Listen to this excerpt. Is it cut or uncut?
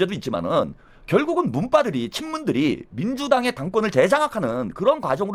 uncut